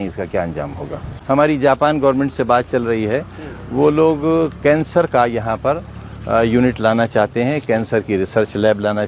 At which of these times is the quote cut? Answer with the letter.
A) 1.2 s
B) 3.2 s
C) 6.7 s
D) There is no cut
A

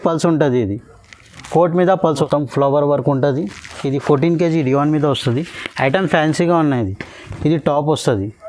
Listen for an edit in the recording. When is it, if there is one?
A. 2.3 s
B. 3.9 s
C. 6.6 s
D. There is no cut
A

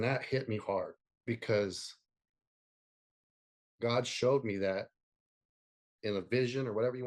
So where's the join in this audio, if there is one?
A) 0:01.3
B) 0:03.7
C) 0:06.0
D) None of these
C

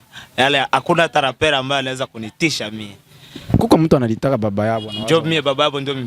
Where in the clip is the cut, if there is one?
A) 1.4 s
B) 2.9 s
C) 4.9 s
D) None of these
C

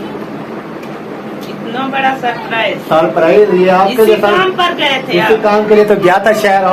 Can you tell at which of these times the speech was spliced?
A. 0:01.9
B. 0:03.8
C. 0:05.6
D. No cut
D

